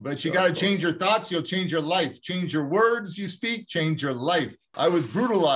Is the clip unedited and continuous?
no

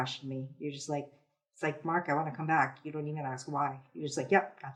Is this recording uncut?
yes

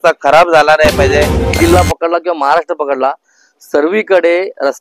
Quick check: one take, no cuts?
no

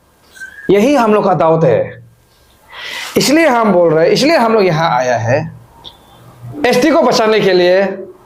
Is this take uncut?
yes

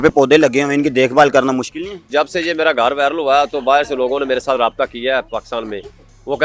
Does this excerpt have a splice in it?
yes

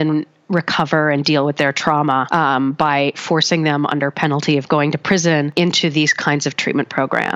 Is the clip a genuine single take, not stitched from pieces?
yes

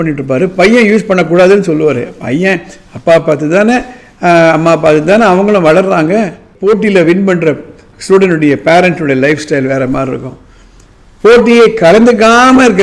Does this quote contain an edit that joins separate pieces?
yes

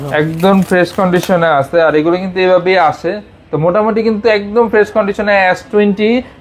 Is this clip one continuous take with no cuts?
yes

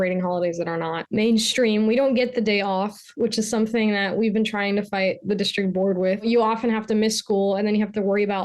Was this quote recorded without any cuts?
no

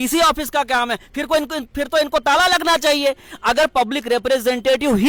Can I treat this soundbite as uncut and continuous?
yes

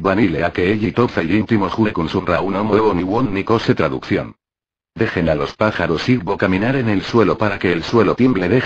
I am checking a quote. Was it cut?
yes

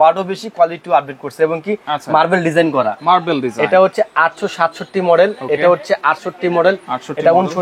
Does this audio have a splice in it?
no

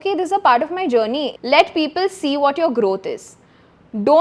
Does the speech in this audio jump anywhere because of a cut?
yes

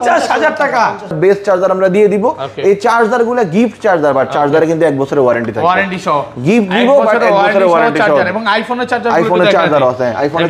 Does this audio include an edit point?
yes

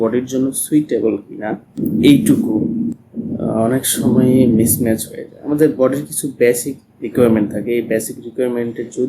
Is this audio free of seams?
no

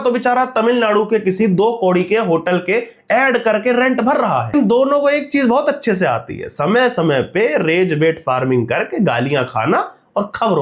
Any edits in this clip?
yes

